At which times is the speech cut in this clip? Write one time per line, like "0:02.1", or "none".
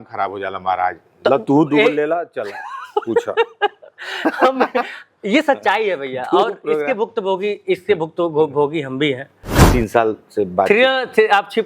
0:09.6